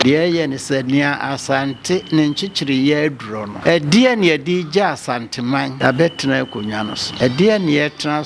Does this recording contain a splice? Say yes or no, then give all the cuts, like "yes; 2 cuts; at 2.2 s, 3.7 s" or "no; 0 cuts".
yes; 3 cuts; at 3.5 s, 5.7 s, 7.0 s